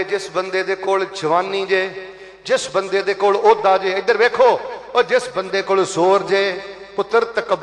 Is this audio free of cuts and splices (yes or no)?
yes